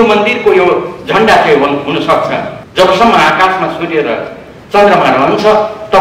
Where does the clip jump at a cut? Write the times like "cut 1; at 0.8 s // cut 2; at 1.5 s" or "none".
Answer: cut 1; at 2.6 s